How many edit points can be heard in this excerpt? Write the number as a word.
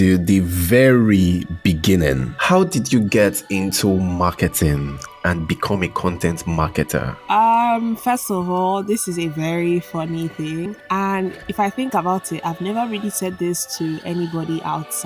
three